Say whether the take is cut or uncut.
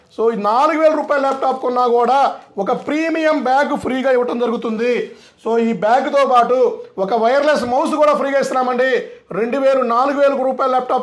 uncut